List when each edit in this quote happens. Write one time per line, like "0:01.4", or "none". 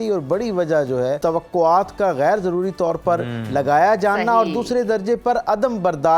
0:01.2